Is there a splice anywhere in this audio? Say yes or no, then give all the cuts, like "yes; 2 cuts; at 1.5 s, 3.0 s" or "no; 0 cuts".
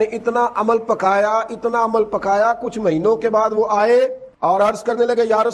no; 0 cuts